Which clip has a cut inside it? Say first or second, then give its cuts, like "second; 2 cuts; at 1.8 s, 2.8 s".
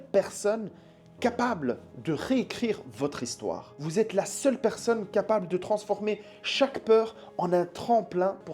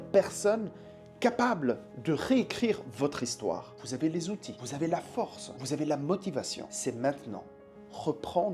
second; 2 cuts; at 3.7 s, 6.7 s